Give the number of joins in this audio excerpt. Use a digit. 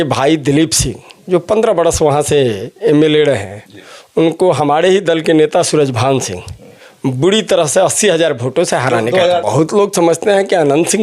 1